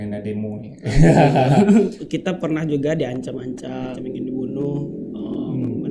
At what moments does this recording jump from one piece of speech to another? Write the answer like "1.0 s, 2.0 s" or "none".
2.1 s, 4.0 s

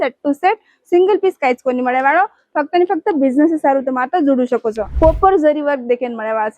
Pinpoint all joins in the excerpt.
4.9 s

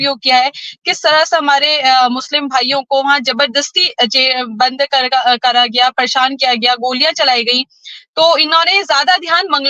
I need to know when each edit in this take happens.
none

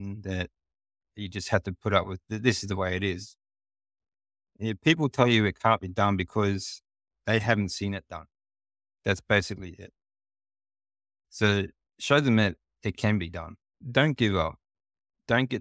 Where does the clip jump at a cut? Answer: 1.1 s, 2.2 s, 13.8 s

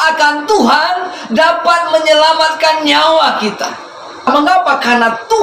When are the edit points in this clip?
4.3 s

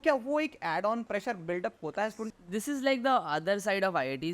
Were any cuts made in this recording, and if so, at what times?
1.1 s, 2.3 s

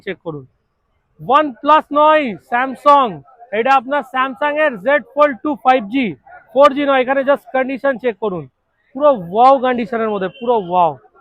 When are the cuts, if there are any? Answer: none

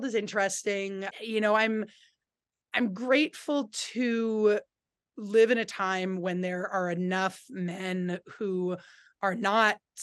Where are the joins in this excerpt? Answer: none

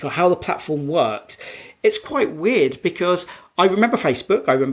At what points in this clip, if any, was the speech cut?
none

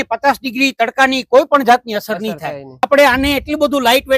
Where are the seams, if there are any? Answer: 2.9 s

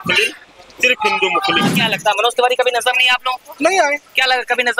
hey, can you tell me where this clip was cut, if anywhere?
1.8 s

